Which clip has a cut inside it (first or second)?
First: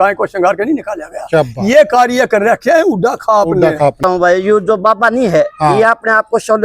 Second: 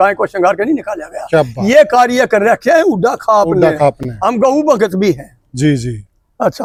first